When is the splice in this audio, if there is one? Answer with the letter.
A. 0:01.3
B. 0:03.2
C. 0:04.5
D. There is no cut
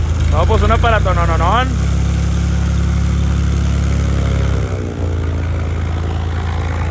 D